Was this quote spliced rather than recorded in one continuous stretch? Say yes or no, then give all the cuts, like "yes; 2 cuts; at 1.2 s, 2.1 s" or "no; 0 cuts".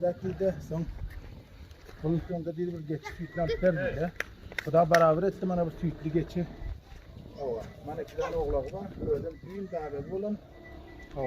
yes; 1 cut; at 2.2 s